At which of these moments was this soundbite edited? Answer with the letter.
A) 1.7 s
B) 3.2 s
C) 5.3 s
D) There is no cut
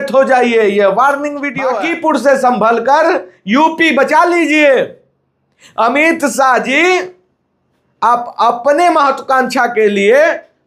A